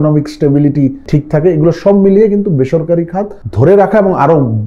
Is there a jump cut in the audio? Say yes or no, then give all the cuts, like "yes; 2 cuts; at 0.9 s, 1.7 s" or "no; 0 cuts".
yes; 2 cuts; at 1.0 s, 3.4 s